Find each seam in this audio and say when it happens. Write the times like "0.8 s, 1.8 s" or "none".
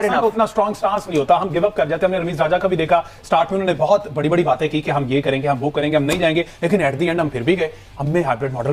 none